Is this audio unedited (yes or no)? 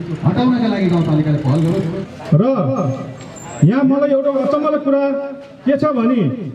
no